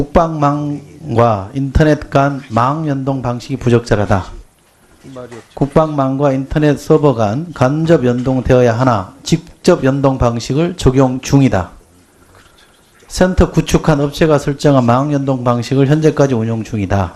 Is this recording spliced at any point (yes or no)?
no